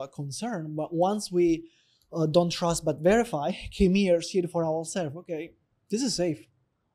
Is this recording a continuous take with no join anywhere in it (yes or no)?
yes